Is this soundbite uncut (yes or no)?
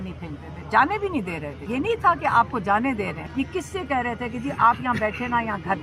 no